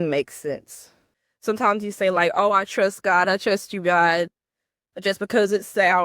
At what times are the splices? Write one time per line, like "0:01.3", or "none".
0:01.3